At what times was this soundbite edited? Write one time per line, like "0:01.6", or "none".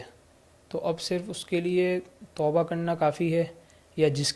none